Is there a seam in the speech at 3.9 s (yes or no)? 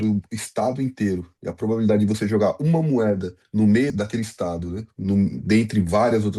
yes